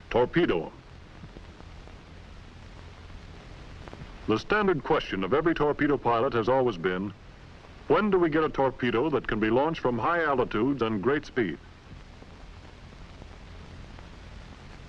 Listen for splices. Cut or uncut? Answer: uncut